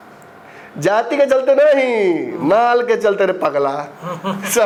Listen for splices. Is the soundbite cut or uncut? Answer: uncut